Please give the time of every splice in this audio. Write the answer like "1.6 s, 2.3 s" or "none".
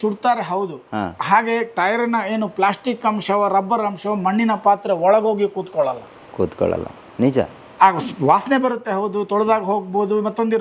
none